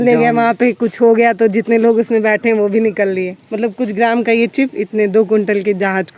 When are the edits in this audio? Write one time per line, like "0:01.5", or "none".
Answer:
0:03.4